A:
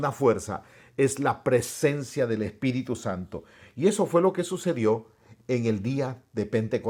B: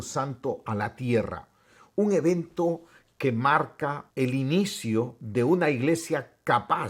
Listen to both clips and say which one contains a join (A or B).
B